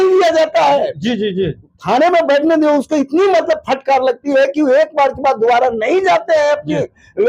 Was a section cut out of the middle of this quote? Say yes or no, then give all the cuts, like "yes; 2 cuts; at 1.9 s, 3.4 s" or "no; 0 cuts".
no; 0 cuts